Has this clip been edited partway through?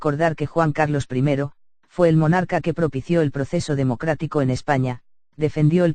no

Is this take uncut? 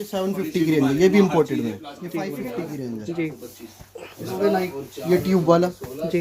no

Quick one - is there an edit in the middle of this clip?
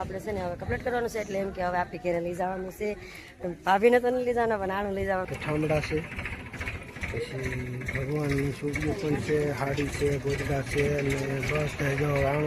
yes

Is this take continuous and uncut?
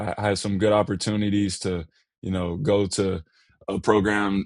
yes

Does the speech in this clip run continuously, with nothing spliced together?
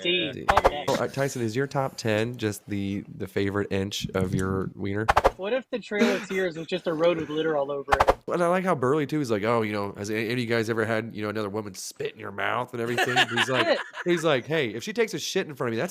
no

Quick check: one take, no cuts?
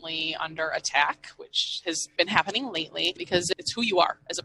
no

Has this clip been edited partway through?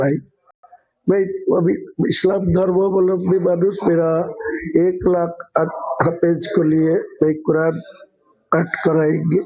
no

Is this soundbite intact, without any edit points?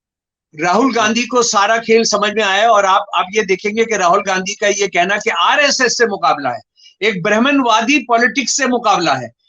yes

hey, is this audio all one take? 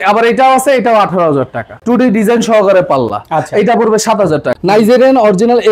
no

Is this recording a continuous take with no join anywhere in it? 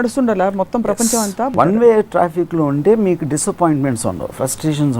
no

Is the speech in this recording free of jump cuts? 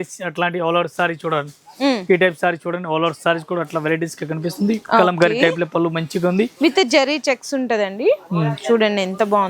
yes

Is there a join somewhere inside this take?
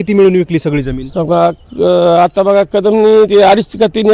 no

